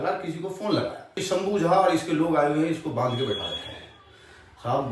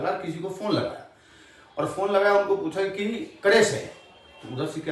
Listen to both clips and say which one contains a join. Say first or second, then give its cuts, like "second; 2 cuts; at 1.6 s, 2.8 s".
first; 1 cut; at 1.2 s